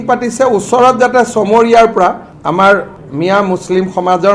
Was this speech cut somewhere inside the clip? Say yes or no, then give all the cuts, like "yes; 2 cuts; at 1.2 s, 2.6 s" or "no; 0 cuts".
yes; 2 cuts; at 2.3 s, 3.0 s